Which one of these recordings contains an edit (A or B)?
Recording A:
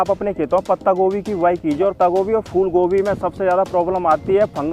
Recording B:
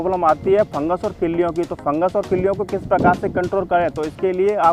A